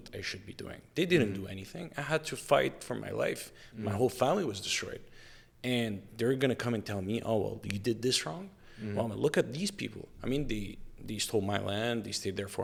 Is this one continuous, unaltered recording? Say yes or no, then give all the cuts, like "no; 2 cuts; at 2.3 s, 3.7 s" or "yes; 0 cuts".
yes; 0 cuts